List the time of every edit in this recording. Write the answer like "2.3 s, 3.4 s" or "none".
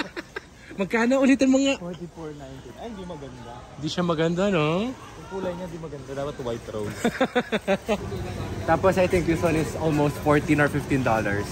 8.0 s